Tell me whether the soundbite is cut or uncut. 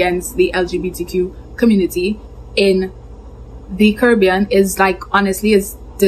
uncut